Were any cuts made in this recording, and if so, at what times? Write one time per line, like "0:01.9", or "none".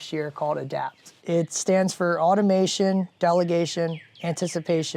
0:01.1